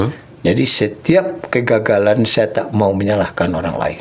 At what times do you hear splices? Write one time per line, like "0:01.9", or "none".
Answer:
none